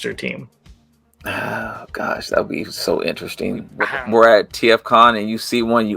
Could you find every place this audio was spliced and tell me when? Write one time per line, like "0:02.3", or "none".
0:03.8